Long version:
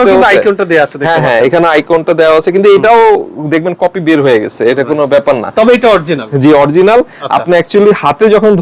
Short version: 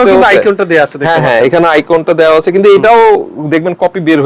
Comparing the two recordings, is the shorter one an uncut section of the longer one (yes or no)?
yes